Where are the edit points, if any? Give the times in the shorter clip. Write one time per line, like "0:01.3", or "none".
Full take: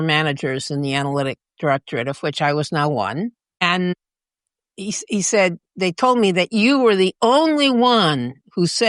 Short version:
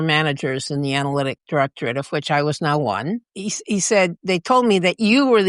0:01.4
0:03.3
0:04.2